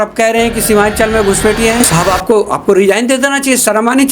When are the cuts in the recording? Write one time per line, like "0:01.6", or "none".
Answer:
0:01.9